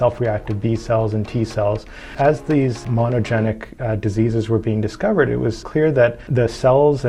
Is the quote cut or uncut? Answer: cut